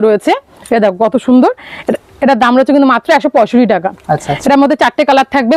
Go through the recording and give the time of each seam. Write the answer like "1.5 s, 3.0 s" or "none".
none